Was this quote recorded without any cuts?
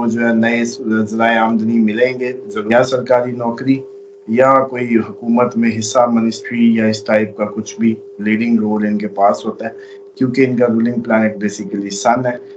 no; 1 cut; at 2.5 s

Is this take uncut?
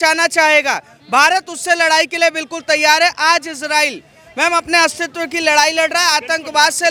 yes; 0 cuts

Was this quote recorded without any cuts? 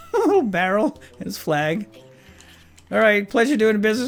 yes; 0 cuts

